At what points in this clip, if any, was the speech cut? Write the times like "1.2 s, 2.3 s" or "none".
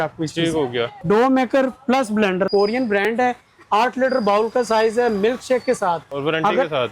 0.9 s, 2.5 s, 6.1 s